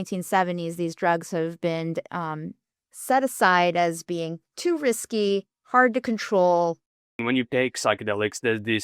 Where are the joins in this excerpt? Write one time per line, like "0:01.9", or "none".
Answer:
0:07.2